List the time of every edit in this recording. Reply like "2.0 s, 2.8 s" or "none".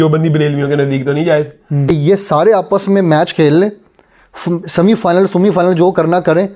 1.8 s